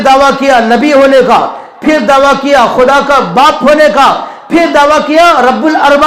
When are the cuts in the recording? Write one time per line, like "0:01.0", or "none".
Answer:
none